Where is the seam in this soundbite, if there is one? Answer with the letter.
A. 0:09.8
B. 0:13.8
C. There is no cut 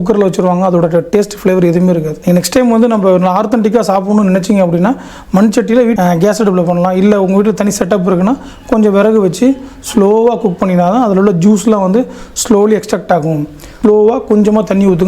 B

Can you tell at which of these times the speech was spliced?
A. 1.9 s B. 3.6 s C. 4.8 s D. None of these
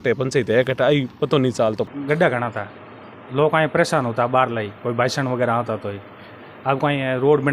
A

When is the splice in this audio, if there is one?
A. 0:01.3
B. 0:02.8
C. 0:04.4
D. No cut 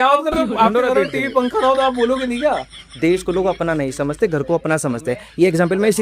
B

